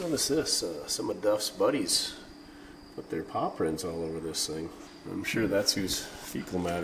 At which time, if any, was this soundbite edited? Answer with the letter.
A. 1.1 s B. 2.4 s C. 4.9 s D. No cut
C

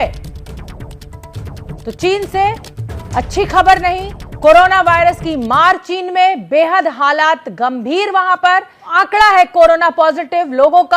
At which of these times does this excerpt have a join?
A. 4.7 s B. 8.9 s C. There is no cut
B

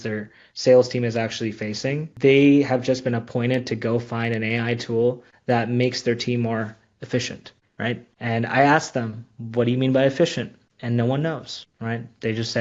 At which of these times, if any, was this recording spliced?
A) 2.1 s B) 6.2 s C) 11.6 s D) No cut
A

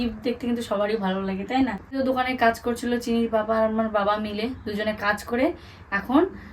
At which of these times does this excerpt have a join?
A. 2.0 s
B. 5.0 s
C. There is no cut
A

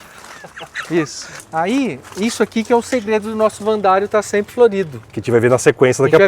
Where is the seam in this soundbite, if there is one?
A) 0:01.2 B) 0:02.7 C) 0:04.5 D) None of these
A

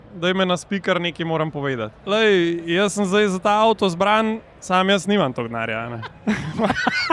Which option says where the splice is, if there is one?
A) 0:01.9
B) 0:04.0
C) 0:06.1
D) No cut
A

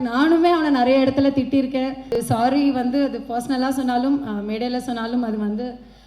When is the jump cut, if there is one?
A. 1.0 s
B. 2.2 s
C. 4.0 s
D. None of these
B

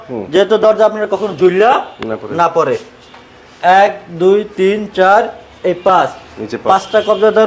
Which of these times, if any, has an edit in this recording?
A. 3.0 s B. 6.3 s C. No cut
C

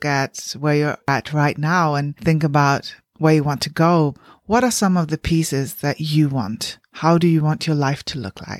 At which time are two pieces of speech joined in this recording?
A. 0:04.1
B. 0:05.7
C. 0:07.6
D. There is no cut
A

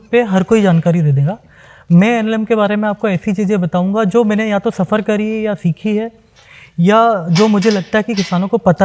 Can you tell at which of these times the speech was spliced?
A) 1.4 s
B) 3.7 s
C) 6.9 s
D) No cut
D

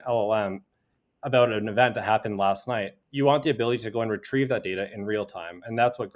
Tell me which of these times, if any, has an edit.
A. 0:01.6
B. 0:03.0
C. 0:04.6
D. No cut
B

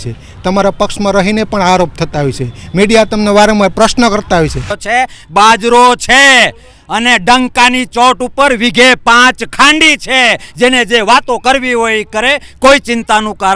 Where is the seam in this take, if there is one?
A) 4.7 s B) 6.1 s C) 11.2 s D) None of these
A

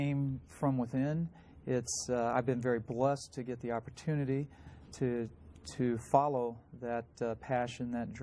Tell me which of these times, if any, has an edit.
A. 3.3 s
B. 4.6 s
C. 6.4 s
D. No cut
A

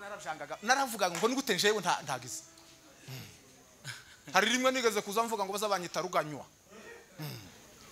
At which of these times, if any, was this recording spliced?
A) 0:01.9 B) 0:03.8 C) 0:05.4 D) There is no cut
D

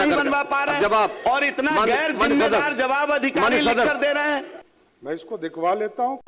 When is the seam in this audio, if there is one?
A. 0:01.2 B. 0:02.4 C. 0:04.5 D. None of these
C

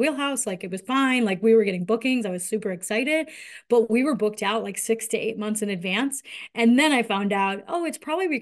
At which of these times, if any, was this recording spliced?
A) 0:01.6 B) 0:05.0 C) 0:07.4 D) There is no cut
D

